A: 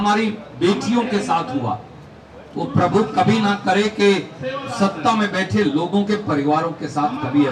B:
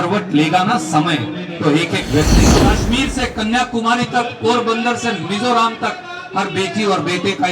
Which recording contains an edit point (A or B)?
B